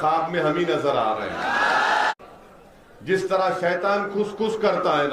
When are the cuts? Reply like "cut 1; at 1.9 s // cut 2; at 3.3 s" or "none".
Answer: cut 1; at 2.1 s